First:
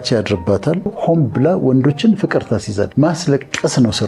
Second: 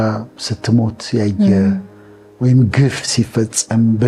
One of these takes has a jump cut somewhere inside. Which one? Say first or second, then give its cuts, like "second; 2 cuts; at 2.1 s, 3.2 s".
first; 2 cuts; at 0.9 s, 2.9 s